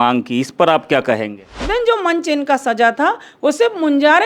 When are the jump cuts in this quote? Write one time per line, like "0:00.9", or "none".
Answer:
0:01.6